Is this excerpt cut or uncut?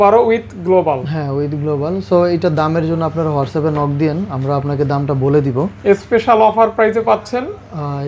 uncut